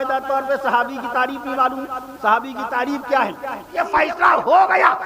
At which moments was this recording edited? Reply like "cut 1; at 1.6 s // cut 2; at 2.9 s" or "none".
cut 1; at 3.8 s